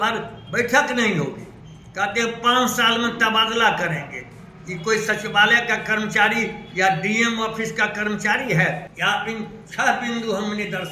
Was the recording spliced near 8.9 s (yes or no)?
yes